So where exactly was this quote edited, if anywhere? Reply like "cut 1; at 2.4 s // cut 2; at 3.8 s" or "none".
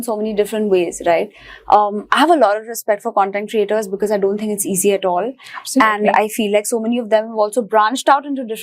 none